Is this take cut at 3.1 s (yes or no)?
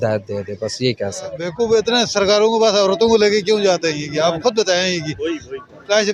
no